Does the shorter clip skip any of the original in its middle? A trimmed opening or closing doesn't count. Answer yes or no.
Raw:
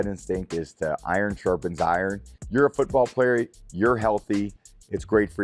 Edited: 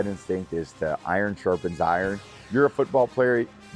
no